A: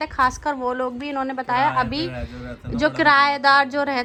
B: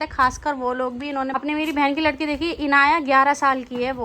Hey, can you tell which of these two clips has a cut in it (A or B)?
B